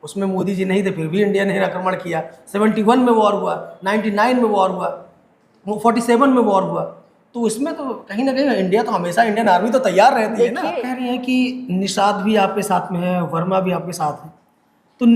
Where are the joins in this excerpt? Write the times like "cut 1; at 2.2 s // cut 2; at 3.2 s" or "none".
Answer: cut 1; at 10.9 s